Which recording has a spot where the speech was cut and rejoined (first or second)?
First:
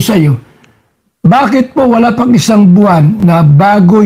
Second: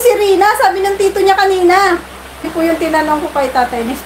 second